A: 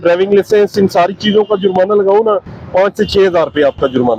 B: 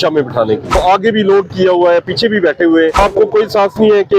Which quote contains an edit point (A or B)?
B